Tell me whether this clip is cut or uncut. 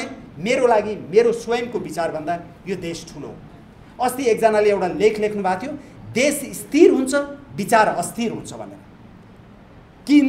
uncut